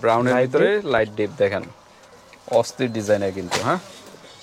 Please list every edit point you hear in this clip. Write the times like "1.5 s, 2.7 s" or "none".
none